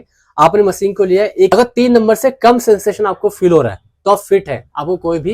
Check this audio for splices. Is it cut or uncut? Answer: cut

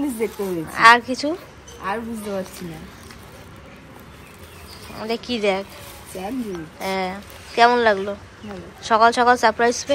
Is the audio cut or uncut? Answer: uncut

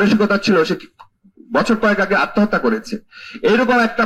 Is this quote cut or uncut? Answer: uncut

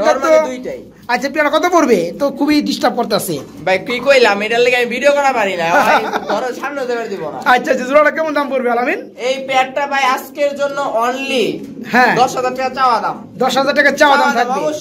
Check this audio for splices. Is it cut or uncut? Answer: uncut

